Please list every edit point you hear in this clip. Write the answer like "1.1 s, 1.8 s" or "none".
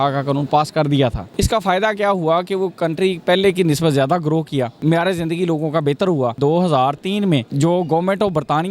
1.2 s, 4.7 s, 6.4 s, 7.5 s